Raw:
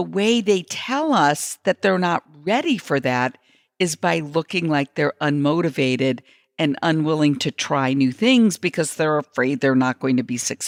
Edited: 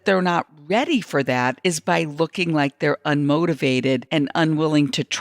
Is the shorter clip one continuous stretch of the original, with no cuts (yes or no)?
no